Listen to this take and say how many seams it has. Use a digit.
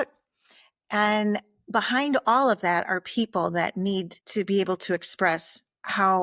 1